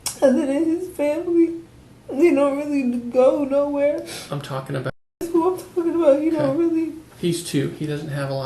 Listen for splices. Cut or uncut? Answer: cut